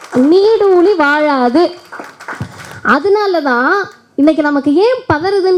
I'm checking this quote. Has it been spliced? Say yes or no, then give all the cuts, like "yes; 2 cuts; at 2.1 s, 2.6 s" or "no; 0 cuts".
no; 0 cuts